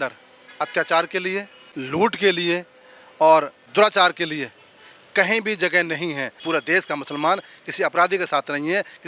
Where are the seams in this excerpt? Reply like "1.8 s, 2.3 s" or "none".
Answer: 3.6 s, 6.3 s

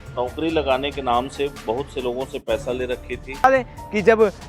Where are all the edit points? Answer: 3.4 s

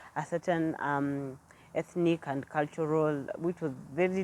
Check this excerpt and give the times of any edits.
none

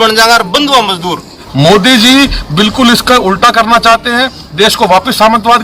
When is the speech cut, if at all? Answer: 1.3 s

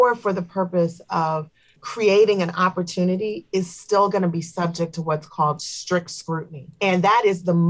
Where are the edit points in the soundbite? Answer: 1.7 s, 6.7 s

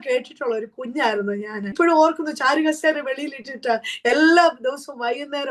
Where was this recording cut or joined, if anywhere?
1.7 s

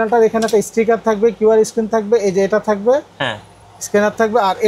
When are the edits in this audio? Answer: none

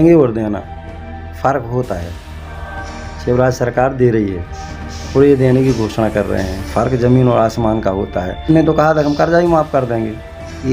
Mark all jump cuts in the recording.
8.5 s

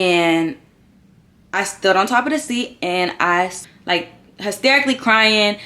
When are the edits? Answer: 3.6 s

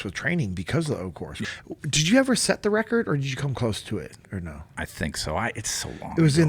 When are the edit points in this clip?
1.4 s, 4.3 s

